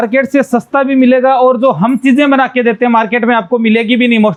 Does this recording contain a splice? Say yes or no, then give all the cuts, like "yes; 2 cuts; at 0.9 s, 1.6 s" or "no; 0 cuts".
no; 0 cuts